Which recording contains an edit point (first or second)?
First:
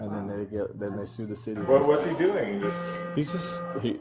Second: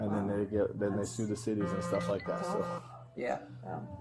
first